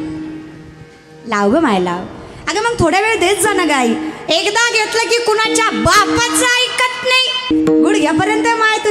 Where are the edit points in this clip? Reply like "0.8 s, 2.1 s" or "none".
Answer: 7.5 s